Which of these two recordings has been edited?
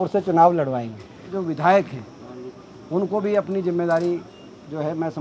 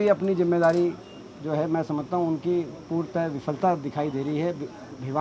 first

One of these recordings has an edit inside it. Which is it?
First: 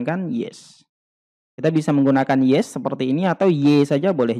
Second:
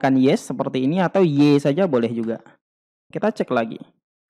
second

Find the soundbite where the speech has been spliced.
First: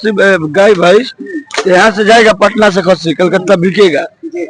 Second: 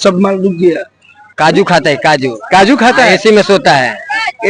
second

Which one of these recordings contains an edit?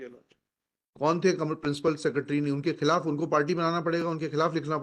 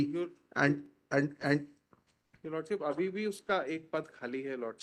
second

